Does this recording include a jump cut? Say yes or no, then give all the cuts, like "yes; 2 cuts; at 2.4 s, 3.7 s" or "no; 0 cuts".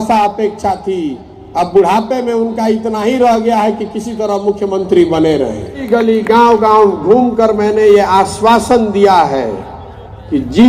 yes; 1 cut; at 5.8 s